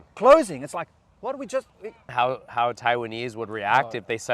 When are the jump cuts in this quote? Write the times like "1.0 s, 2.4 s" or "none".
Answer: 2.1 s